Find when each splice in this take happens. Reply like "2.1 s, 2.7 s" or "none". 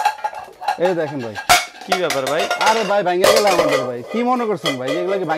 none